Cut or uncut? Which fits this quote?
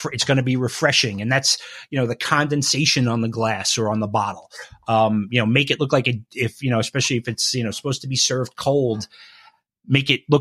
uncut